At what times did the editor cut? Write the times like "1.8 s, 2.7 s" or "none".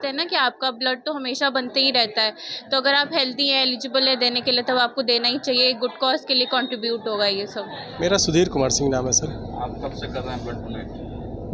none